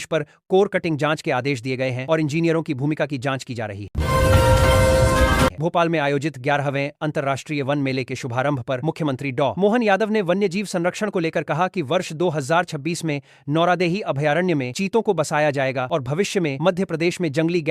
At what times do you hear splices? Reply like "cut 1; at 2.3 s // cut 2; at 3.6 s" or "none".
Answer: cut 1; at 3.9 s // cut 2; at 5.5 s